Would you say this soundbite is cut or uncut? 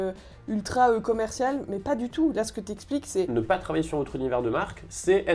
cut